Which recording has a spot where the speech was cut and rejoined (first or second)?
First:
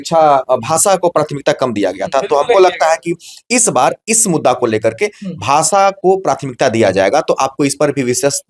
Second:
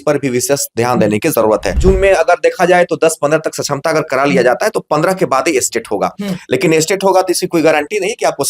second